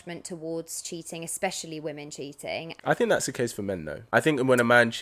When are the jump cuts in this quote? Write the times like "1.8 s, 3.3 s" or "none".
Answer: 2.7 s, 3.9 s